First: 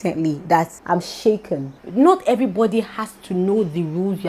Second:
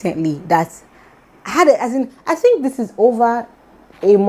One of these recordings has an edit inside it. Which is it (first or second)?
first